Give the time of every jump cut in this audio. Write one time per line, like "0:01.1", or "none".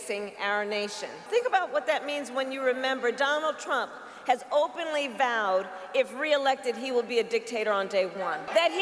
0:01.2